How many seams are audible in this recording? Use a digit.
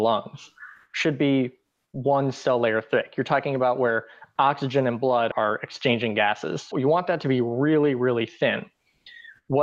2